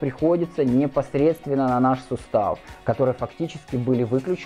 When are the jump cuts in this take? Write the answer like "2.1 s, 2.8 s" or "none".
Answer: 2.7 s